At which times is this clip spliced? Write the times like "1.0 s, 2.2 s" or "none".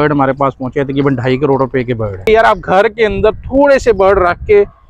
2.2 s